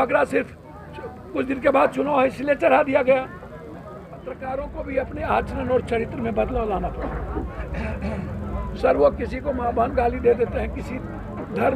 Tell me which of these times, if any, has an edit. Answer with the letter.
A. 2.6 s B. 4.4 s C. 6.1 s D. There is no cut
B